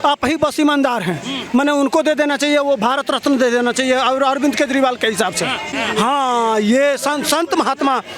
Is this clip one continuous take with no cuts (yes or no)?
no